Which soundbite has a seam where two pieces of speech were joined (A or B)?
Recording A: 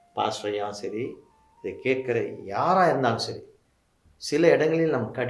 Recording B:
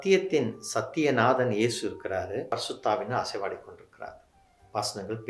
B